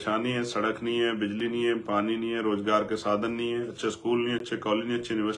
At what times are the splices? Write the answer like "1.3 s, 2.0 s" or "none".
none